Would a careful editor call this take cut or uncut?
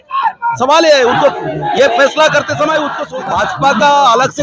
cut